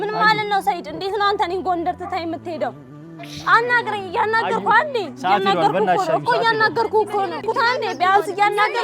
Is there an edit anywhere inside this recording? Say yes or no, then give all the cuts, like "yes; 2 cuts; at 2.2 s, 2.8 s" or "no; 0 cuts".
yes; 1 cut; at 7.4 s